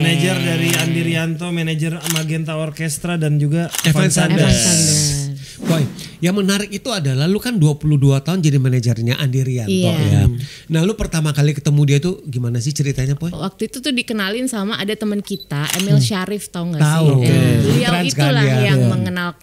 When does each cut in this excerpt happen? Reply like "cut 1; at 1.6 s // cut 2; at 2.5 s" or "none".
cut 1; at 5.5 s // cut 2; at 13.3 s // cut 3; at 17.7 s

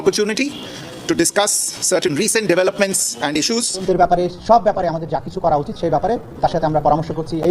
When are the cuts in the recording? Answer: cut 1; at 3.8 s

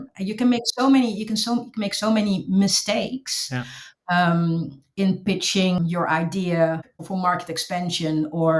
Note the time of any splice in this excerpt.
cut 1; at 5.8 s // cut 2; at 6.9 s

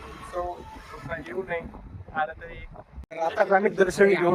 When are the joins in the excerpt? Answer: cut 1; at 3.0 s

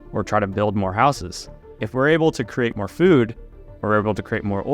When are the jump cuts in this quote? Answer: cut 1; at 1.8 s // cut 2; at 2.7 s

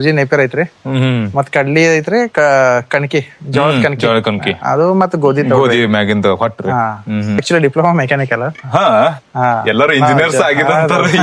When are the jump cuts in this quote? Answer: cut 1; at 7.4 s

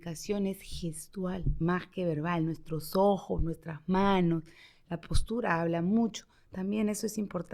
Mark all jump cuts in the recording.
cut 1; at 1.5 s

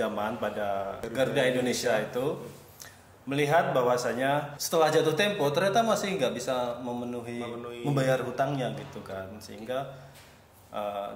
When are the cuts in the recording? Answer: cut 1; at 1.0 s // cut 2; at 4.6 s

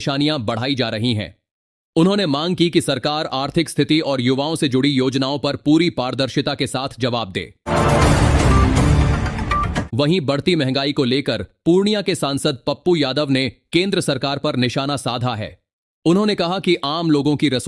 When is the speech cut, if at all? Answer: cut 1; at 7.5 s // cut 2; at 9.9 s

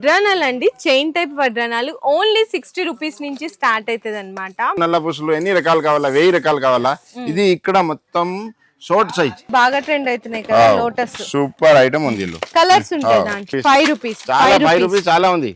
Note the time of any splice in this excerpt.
cut 1; at 4.8 s // cut 2; at 9.5 s // cut 3; at 13.5 s

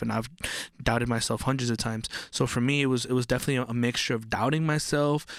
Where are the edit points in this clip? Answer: none

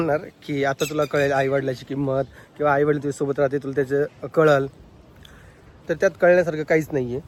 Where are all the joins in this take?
none

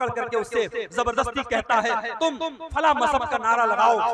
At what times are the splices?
none

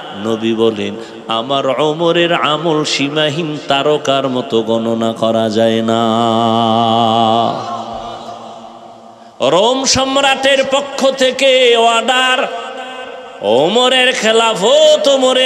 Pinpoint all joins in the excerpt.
cut 1; at 9.2 s

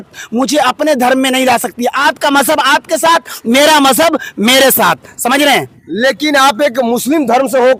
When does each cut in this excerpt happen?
none

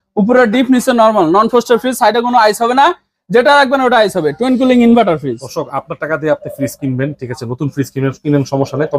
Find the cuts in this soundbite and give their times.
none

